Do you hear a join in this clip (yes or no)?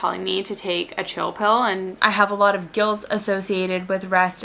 yes